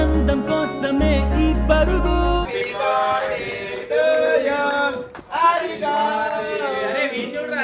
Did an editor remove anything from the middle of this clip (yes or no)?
yes